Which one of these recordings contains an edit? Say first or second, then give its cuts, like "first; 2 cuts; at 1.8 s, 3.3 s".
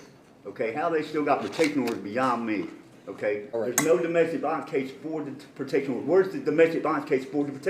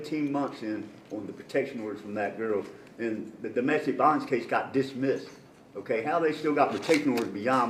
first; 1 cut; at 3.5 s